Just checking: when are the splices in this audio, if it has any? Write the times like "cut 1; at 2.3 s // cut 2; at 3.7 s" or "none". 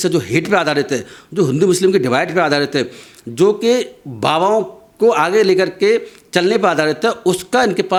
none

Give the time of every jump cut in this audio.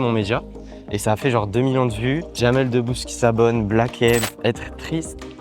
cut 1; at 2.4 s // cut 2; at 4.3 s

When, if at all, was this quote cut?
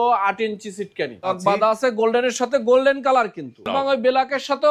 cut 1; at 1.3 s // cut 2; at 3.7 s

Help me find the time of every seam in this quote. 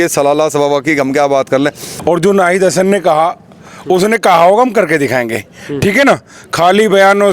cut 1; at 1.9 s

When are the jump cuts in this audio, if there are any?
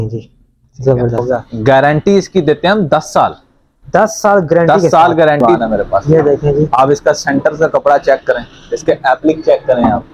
cut 1; at 1.2 s // cut 2; at 5.5 s

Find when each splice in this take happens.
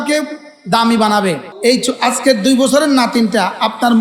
cut 1; at 1.5 s

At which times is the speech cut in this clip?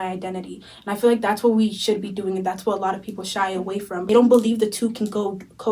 cut 1; at 4.1 s

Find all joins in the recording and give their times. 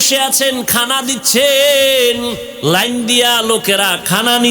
cut 1; at 2.5 s

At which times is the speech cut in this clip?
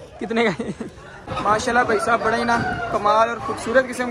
cut 1; at 1.2 s

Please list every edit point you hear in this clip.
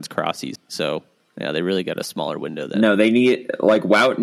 cut 1; at 0.9 s

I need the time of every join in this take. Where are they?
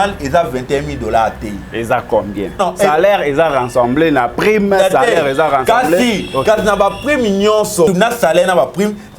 cut 1; at 2.6 s // cut 2; at 7.9 s

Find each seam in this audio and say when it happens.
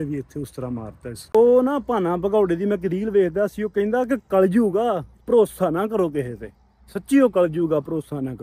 cut 1; at 1.3 s

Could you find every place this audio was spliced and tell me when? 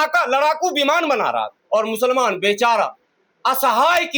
cut 1; at 1.5 s

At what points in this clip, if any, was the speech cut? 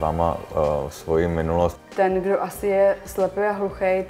cut 1; at 1.7 s

